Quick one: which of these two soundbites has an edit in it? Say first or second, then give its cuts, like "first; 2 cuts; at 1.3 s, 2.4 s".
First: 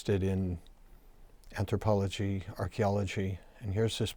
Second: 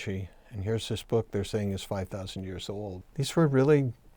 second; 1 cut; at 3.0 s